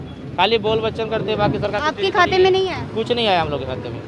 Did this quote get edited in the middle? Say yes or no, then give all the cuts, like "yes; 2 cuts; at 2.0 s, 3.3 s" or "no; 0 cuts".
no; 0 cuts